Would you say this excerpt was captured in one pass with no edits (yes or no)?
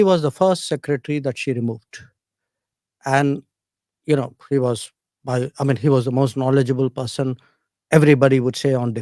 yes